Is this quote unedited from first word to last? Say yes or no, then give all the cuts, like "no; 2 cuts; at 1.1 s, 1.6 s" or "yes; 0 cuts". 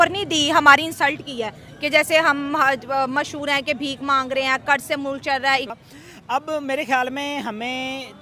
no; 1 cut; at 5.7 s